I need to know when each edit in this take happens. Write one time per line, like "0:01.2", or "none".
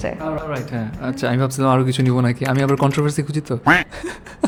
none

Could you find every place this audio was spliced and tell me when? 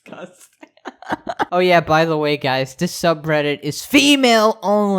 0:01.5

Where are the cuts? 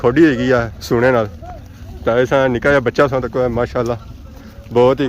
none

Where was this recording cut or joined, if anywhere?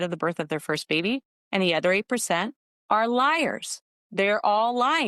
none

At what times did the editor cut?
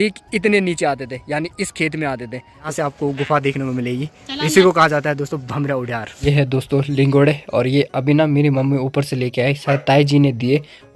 0:02.6
0:06.2

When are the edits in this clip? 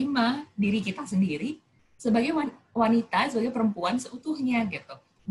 none

